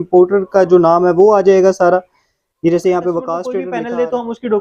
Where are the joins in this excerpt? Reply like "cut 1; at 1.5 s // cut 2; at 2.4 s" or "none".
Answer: cut 1; at 3.6 s